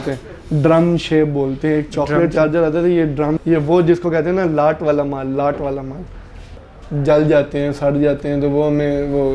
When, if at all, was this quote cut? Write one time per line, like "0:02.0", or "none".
0:03.4
0:06.5